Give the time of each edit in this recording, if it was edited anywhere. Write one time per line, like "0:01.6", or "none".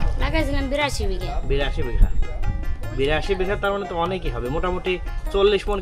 none

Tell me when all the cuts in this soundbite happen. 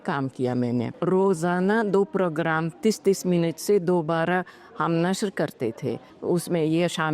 0:00.9
0:06.1

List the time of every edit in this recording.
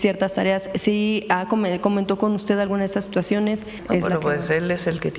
0:03.7

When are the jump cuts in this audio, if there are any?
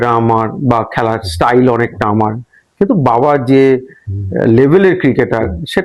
none

